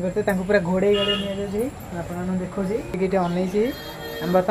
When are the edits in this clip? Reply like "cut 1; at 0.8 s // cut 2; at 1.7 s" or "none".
cut 1; at 2.9 s

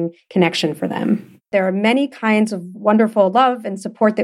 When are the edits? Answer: cut 1; at 1.5 s

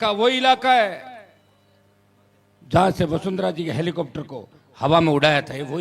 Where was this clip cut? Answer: none

